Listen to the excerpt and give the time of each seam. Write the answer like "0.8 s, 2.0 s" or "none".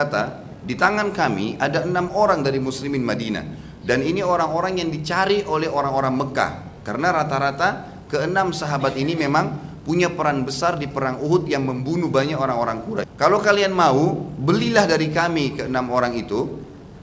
13.1 s